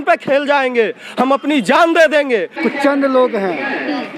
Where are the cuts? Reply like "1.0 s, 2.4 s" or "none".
2.6 s